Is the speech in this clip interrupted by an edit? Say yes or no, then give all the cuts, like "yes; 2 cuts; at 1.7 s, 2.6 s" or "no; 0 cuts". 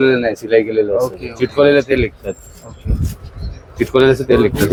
no; 0 cuts